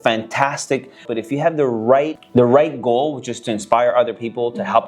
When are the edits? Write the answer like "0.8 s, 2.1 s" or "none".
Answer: 1.0 s, 2.2 s